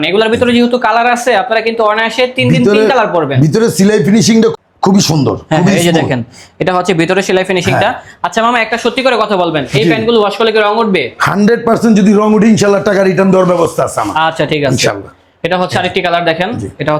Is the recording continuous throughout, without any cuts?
yes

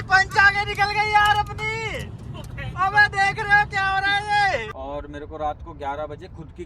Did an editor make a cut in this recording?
yes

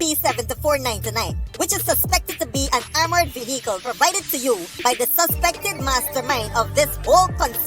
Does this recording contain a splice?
no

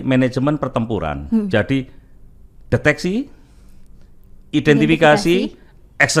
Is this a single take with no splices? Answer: yes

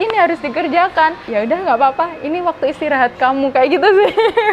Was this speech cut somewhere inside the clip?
yes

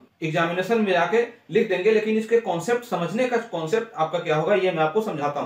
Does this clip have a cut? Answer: no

